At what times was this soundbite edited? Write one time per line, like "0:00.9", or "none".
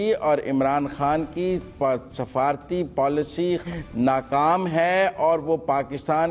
0:03.6